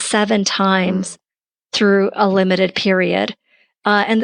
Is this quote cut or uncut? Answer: uncut